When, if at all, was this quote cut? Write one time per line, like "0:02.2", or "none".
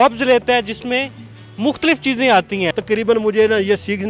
0:02.7